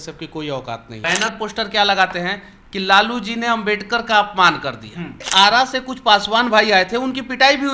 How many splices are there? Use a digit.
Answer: 2